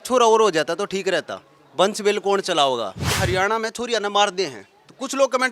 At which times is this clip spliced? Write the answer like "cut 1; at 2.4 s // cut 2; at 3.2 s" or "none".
cut 1; at 3.1 s